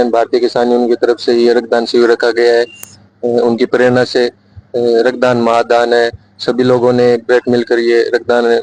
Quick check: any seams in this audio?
no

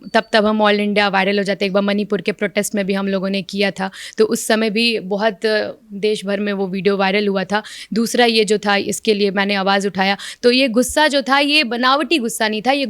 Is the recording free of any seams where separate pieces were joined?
yes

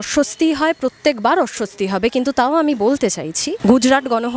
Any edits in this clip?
yes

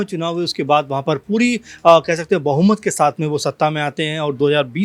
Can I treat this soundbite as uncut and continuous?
yes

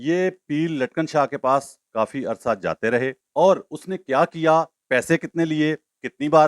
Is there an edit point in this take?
yes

